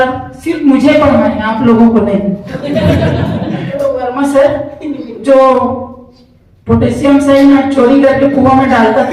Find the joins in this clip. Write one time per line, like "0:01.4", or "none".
0:03.8

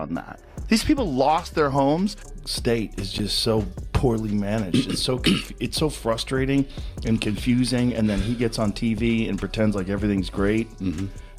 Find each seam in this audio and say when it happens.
0:02.2

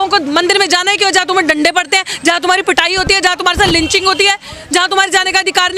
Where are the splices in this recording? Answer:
none

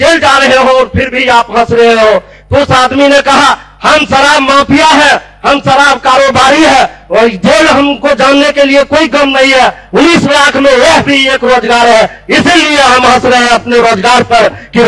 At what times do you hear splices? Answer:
none

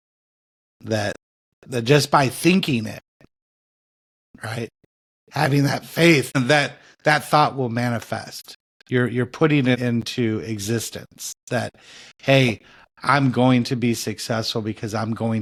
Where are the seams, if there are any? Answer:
none

